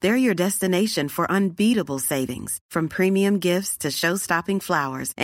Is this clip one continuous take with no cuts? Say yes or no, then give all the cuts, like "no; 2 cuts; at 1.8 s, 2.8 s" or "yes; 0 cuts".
yes; 0 cuts